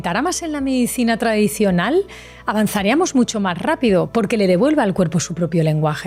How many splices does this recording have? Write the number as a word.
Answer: zero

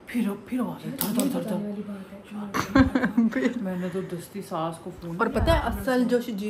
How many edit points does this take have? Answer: one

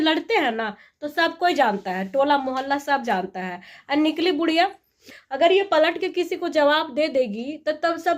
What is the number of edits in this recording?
one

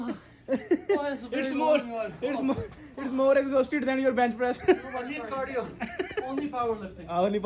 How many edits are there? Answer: zero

